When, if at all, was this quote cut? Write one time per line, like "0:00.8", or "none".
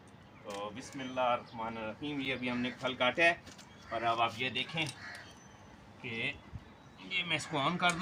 none